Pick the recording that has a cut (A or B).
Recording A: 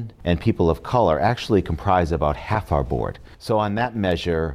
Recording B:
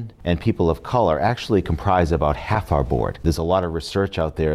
B